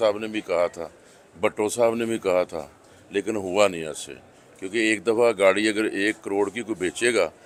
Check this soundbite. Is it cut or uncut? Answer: uncut